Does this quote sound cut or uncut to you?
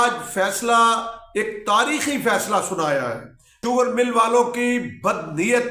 cut